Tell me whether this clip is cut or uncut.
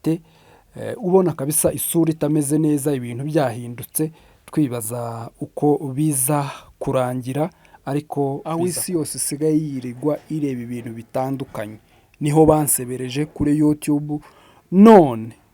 cut